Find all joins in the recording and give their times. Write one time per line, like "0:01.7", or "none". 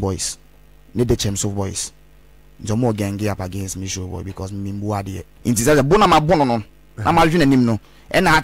0:05.2

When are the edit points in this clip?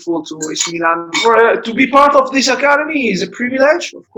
0:01.1

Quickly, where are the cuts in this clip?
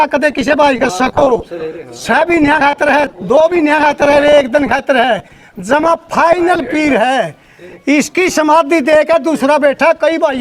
none

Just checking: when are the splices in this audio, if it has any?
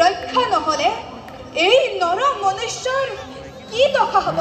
none

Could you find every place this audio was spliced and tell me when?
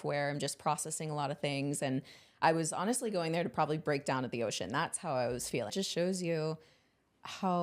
0:05.7

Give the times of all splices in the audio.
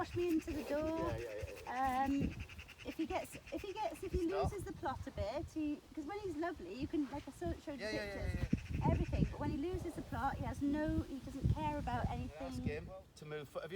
0:12.7

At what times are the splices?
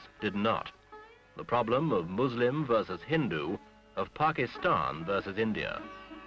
0:04.2

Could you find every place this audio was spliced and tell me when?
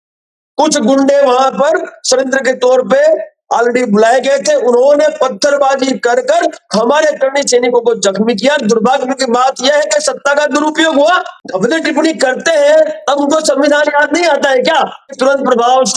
0:11.3
0:15.1

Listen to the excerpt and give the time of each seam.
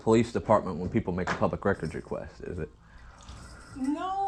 none

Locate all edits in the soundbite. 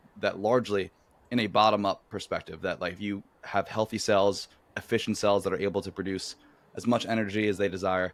none

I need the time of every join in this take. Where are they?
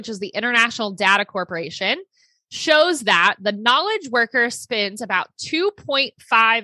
none

